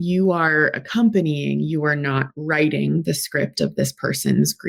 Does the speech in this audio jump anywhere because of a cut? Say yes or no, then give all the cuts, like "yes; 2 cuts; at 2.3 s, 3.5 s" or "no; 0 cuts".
no; 0 cuts